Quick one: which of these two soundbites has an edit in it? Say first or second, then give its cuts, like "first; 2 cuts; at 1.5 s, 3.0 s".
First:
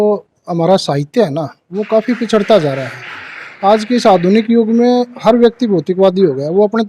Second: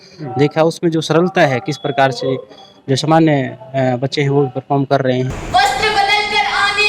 second; 1 cut; at 5.4 s